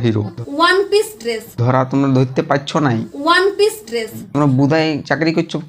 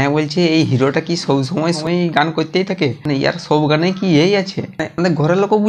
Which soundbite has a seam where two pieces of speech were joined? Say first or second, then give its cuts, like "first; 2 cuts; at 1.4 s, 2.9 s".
second; 1 cut; at 1.8 s